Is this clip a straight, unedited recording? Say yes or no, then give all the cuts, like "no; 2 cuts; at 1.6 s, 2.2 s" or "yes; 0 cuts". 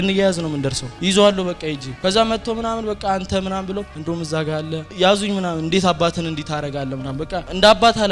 yes; 0 cuts